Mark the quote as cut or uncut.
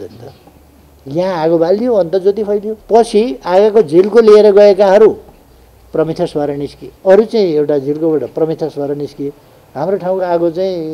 cut